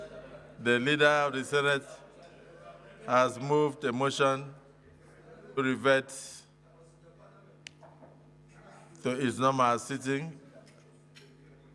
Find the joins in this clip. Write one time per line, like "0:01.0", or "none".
0:05.5